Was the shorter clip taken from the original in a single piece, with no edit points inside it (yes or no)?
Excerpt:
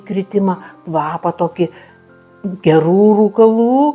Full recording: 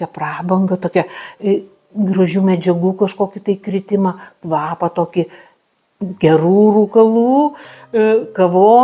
yes